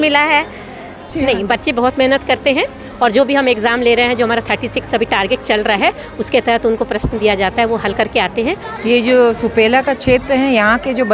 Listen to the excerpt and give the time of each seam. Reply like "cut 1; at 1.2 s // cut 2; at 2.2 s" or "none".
cut 1; at 1.1 s // cut 2; at 8.7 s